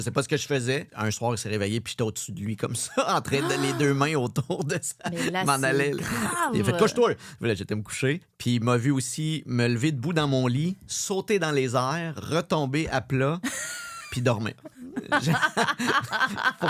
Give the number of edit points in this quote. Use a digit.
2